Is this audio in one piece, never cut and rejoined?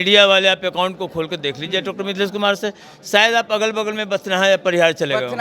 yes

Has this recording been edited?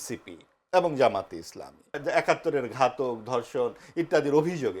yes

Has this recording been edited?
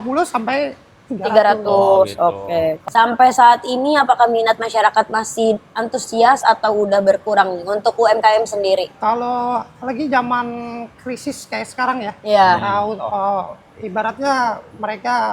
yes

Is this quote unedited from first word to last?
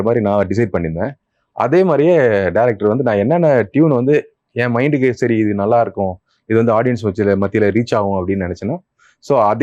yes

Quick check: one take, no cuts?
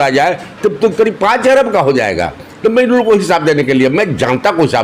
yes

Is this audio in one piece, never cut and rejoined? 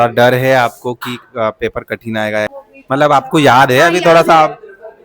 no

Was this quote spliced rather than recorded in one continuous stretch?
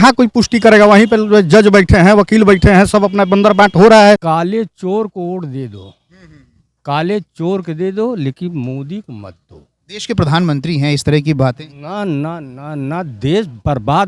yes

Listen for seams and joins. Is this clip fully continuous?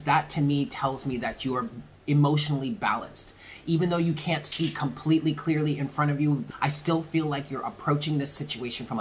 no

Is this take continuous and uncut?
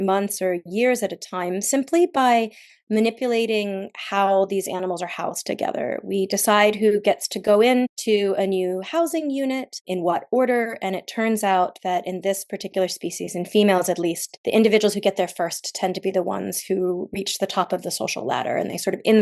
no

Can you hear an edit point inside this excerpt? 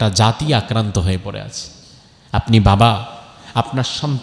no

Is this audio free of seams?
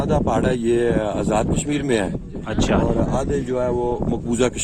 yes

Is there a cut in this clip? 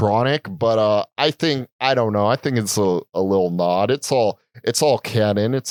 no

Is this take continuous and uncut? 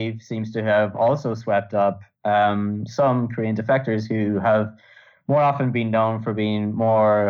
yes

